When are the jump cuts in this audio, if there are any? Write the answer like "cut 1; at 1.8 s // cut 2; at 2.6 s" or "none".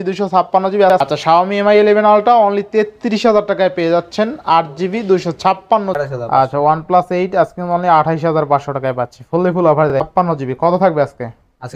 cut 1; at 1.0 s // cut 2; at 6.0 s // cut 3; at 10.0 s